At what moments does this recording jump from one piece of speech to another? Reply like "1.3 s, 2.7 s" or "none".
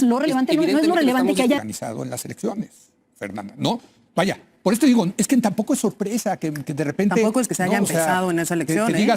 1.6 s